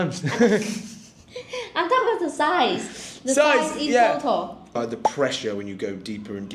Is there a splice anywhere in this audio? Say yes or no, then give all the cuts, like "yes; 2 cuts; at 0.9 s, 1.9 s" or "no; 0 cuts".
yes; 1 cut; at 4.6 s